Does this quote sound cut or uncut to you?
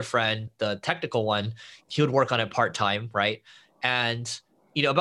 uncut